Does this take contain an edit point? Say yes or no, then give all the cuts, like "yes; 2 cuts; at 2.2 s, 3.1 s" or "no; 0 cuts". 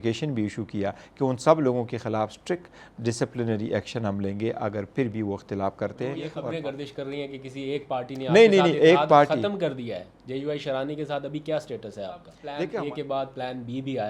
yes; 2 cuts; at 6.3 s, 12.4 s